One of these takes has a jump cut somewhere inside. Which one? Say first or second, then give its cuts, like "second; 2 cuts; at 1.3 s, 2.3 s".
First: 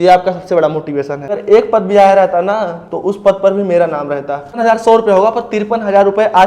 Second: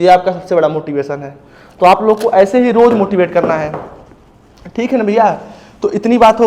first; 2 cuts; at 1.3 s, 4.6 s